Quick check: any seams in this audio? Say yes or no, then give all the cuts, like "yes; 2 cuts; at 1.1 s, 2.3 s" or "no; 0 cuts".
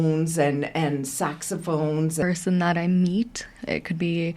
yes; 1 cut; at 2.2 s